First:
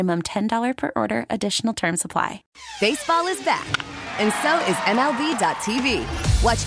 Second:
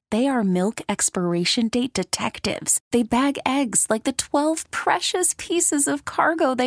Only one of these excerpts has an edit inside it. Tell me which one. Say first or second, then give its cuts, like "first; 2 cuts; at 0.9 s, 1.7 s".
first; 1 cut; at 2.5 s